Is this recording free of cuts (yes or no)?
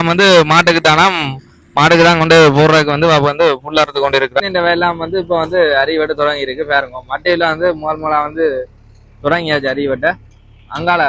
no